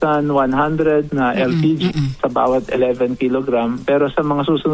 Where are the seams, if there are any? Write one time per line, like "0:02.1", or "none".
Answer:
0:01.1
0:02.2
0:03.8